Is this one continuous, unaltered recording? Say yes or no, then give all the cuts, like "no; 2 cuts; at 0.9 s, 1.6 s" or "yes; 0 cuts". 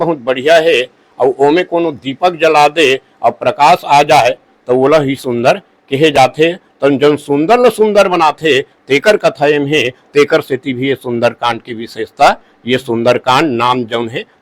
yes; 0 cuts